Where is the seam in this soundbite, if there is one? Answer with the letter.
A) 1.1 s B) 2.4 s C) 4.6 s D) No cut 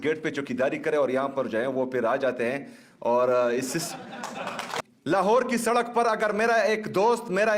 C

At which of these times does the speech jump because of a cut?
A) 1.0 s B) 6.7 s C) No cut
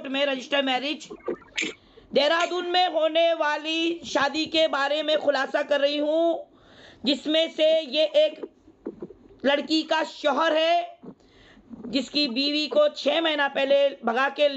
A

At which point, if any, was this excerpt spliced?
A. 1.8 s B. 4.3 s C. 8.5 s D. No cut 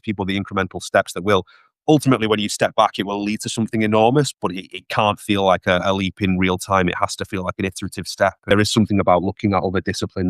C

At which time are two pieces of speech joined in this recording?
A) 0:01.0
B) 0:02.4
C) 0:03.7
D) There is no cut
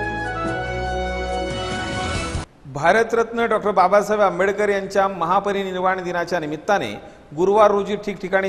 B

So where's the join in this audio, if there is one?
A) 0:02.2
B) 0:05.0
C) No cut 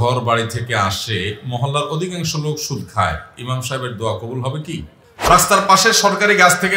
B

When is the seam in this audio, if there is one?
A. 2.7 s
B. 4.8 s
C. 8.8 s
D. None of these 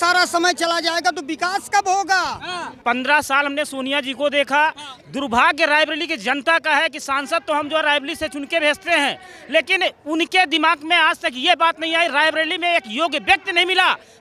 A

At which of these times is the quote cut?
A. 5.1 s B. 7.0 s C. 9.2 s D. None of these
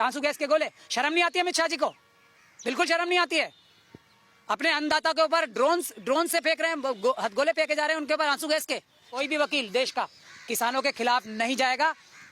C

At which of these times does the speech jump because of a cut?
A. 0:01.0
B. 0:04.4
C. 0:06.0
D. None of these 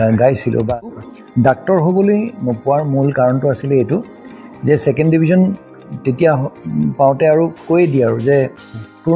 A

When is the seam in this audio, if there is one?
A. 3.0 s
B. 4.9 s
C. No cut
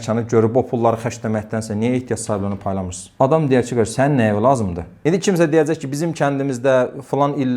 B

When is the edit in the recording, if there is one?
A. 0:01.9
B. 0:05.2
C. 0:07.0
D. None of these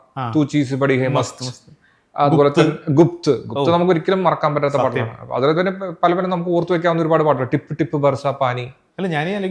D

